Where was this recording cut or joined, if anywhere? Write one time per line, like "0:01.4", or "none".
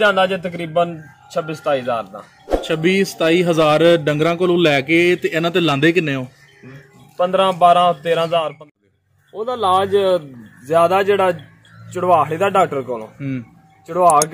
0:08.6